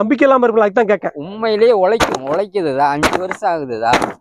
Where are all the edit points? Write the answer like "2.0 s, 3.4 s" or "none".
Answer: none